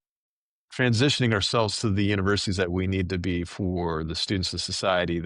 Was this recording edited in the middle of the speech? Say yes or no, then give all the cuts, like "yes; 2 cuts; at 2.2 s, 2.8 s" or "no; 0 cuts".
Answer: no; 0 cuts